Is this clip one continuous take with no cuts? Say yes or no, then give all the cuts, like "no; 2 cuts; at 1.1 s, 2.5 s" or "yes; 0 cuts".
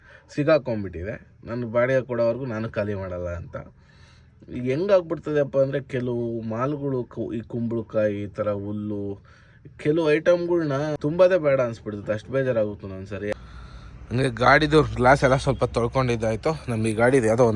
no; 1 cut; at 13.3 s